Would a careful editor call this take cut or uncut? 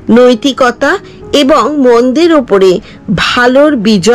uncut